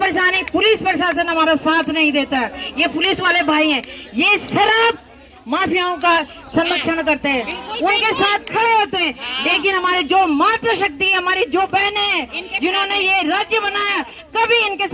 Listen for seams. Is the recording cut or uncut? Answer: uncut